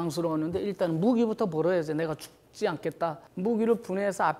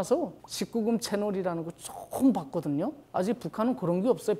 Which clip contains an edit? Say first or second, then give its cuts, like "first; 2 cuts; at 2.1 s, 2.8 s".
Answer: first; 1 cut; at 3.2 s